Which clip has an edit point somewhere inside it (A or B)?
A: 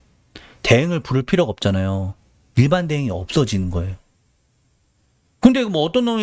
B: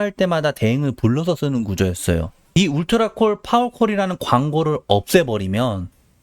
B